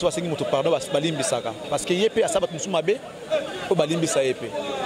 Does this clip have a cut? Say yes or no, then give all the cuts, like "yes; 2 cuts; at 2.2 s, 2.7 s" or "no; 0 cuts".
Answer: no; 0 cuts